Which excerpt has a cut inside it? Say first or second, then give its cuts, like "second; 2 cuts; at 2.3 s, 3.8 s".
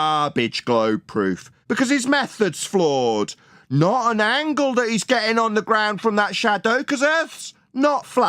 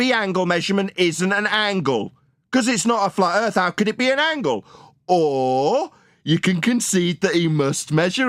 first; 1 cut; at 1.5 s